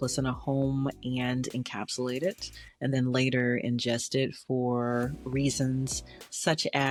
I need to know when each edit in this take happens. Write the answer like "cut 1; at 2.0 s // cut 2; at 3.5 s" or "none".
none